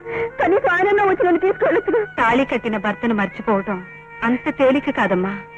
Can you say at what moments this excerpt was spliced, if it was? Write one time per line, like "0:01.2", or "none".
0:02.1